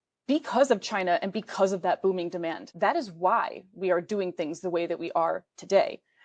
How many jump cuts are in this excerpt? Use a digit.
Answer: 1